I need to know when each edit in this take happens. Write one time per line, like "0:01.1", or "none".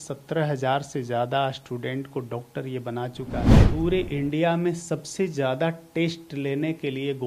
0:03.5

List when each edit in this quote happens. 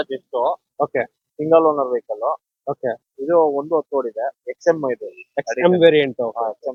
none

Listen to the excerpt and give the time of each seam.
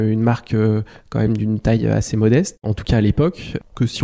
none

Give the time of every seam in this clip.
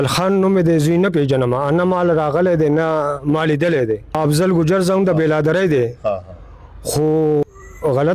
0:04.1
0:07.4

